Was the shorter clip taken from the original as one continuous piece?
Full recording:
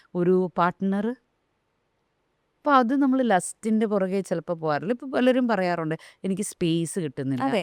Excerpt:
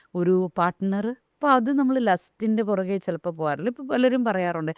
no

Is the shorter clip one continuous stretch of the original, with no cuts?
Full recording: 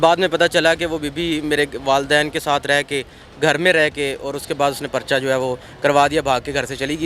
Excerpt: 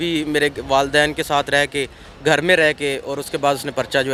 yes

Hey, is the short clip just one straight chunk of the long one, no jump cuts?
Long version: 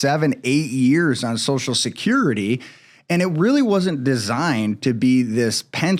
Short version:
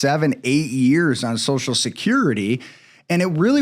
yes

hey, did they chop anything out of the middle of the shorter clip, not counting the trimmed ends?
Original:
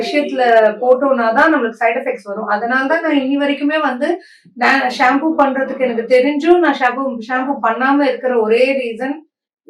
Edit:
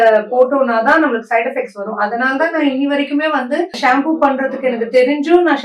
yes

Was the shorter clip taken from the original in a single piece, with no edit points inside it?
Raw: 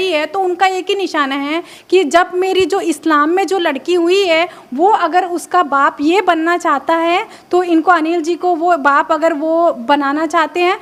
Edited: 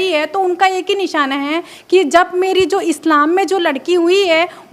yes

